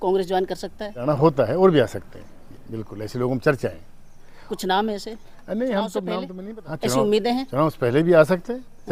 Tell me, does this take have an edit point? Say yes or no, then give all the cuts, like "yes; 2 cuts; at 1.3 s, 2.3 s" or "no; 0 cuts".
yes; 2 cuts; at 1.0 s, 6.3 s